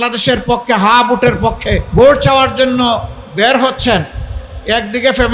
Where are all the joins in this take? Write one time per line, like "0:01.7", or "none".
0:01.8